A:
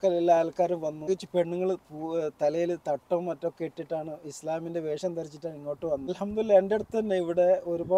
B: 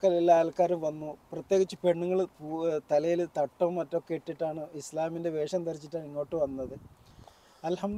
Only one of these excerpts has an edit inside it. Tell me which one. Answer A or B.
A